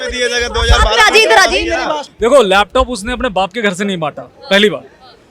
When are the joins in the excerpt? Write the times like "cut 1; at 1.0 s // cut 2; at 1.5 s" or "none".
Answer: cut 1; at 2.0 s